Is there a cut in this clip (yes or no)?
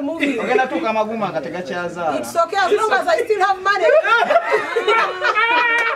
no